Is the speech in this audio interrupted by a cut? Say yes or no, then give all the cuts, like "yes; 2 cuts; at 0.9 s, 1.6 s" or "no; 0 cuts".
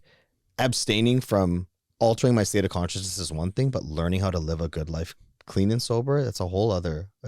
no; 0 cuts